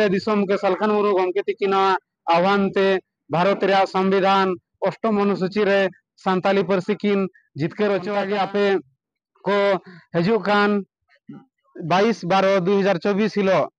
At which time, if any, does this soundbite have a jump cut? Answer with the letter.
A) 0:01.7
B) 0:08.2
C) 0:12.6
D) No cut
B